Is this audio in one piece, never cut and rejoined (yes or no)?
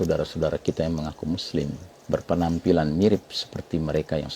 no